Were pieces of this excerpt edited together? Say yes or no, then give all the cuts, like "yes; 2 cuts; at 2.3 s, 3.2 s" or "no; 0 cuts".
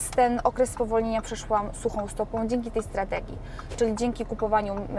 no; 0 cuts